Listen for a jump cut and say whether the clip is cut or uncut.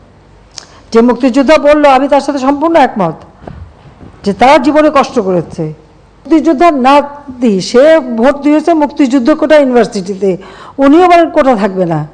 cut